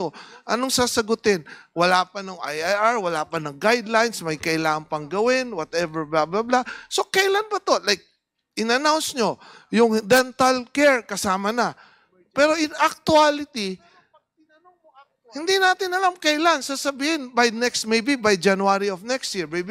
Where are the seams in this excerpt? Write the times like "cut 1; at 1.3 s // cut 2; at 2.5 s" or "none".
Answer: none